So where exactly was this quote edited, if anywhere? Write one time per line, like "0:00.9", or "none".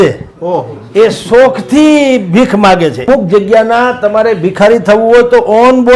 0:03.1